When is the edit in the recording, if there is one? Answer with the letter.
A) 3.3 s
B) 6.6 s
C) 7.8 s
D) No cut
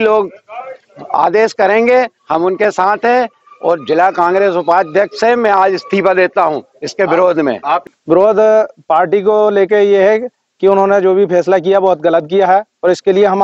C